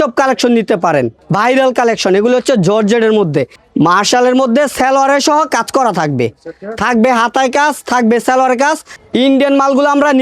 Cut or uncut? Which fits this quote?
cut